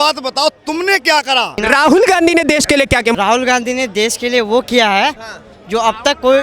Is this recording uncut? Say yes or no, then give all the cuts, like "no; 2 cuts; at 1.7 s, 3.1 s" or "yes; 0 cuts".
no; 2 cuts; at 1.6 s, 3.1 s